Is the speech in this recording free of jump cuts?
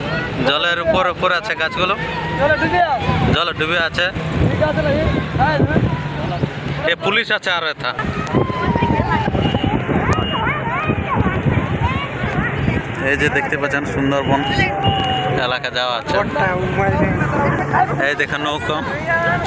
yes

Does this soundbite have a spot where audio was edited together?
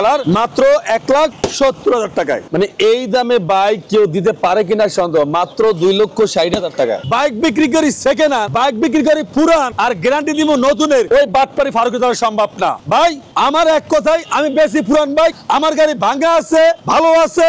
yes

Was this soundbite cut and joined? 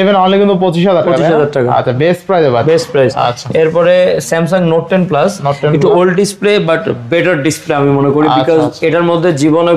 no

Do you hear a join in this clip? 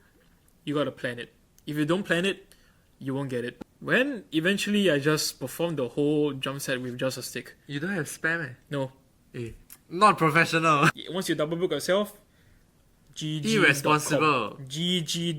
yes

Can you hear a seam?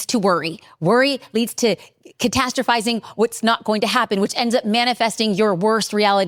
no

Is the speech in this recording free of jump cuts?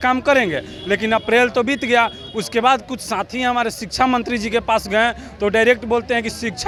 yes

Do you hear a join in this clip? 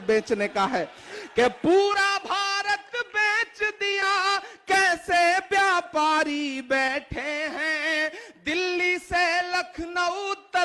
no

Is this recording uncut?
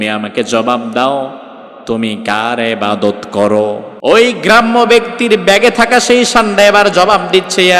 no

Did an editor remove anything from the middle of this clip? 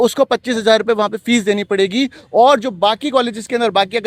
no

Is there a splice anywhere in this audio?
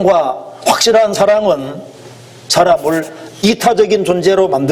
no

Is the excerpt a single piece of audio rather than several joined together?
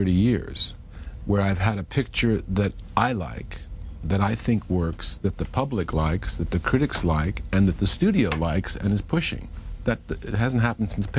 no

